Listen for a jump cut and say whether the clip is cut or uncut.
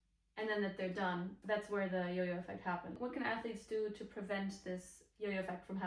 cut